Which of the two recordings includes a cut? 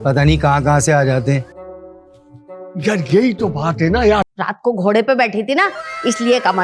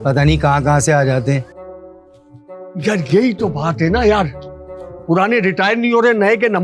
first; 1 cut; at 4.4 s

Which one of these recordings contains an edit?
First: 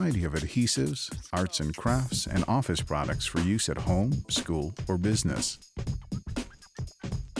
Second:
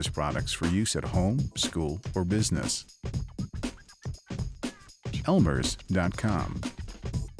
second; 1 cut; at 6.5 s

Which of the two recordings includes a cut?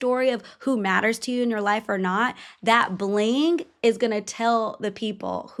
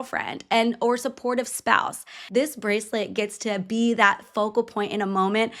second; 1 cut; at 2.1 s

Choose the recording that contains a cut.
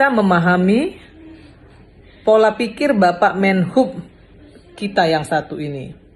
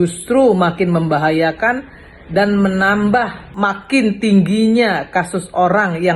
second; 1 cut; at 3.4 s

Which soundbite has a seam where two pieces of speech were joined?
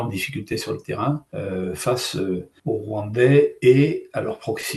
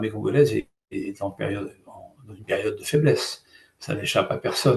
first; 2 cuts; at 1.3 s, 2.5 s

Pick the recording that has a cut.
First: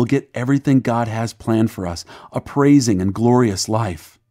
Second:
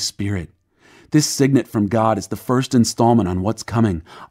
second; 1 cut; at 1.7 s

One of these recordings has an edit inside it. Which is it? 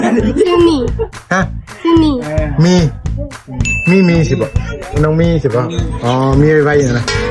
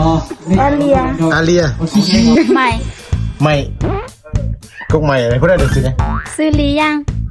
second; 1 cut; at 2.4 s

